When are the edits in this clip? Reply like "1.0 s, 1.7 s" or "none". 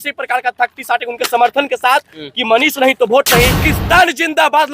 3.6 s